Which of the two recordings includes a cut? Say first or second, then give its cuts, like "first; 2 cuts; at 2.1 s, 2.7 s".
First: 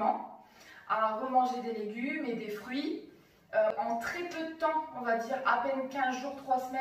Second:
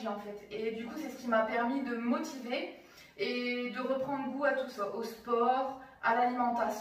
first; 1 cut; at 3.7 s